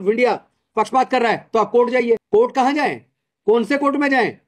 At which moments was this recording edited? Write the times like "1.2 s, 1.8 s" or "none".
2.2 s